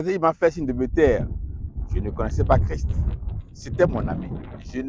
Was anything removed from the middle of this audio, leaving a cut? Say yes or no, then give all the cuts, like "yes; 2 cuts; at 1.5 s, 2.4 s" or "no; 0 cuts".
no; 0 cuts